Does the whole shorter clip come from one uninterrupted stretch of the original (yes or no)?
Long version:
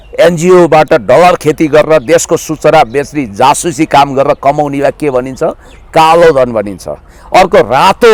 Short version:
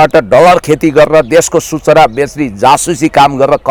yes